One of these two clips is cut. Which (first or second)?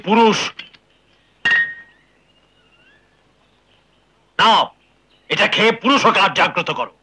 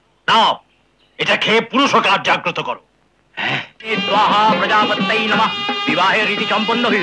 second